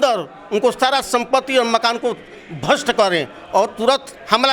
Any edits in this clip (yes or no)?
no